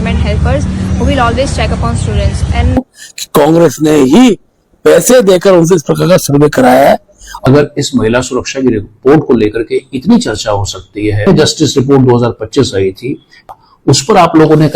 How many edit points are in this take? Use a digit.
4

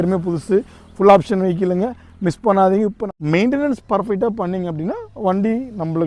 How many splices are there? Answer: 1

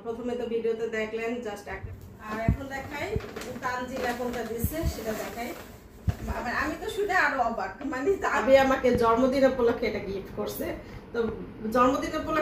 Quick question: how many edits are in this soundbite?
2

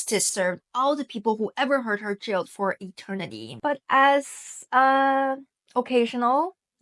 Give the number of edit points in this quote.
1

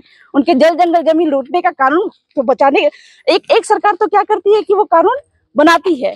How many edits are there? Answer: 0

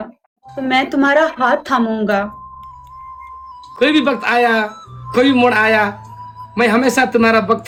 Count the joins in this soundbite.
0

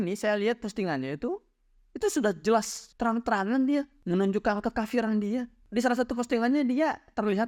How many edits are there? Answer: 0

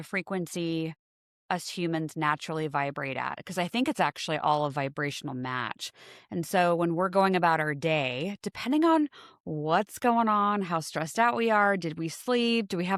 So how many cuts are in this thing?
0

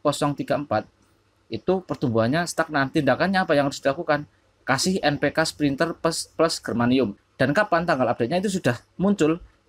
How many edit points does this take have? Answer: 1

